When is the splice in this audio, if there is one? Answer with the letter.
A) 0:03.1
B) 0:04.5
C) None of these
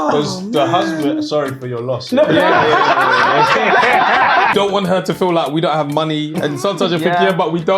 B